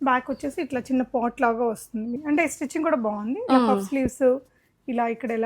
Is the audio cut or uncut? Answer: cut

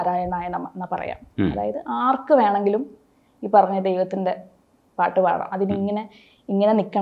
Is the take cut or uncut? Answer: uncut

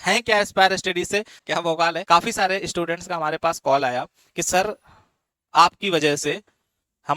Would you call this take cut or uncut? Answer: cut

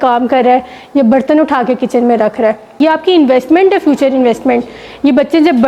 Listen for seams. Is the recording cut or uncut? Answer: cut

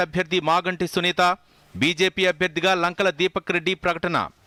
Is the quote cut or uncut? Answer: uncut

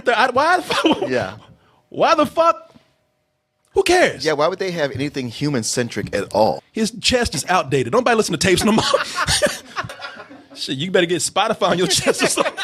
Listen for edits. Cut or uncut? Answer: cut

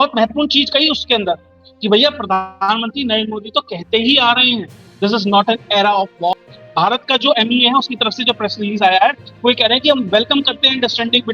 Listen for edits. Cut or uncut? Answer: cut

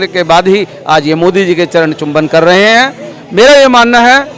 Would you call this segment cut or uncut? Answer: uncut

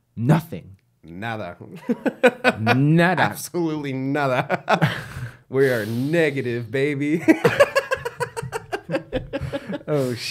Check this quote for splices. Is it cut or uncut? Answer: uncut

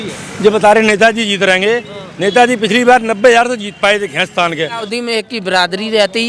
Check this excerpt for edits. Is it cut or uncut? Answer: cut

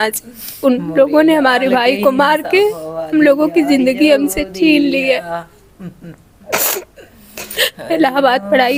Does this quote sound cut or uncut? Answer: uncut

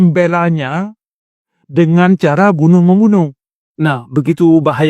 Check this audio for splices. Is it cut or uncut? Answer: cut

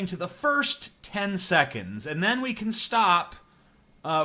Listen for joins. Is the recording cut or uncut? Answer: uncut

